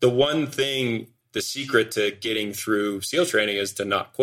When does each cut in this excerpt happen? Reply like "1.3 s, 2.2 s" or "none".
1.2 s